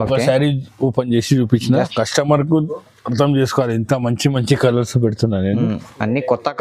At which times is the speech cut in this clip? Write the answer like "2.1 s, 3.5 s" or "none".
1.9 s